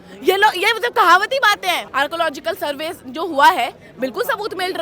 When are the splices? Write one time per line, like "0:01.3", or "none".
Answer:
0:01.9